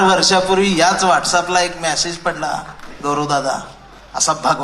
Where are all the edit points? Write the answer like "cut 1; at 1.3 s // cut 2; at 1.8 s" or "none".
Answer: none